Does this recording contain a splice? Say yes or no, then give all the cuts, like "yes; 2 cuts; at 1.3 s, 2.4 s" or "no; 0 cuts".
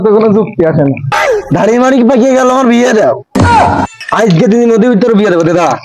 yes; 2 cuts; at 1.1 s, 4.0 s